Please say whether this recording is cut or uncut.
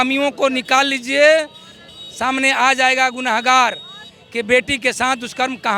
uncut